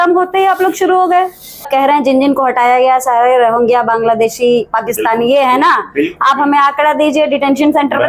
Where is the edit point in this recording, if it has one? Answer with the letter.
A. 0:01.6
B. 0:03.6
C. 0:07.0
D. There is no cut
A